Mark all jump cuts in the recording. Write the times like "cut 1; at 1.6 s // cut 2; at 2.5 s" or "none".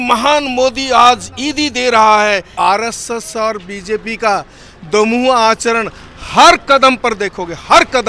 cut 1; at 2.5 s